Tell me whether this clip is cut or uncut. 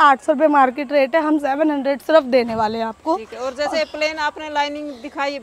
uncut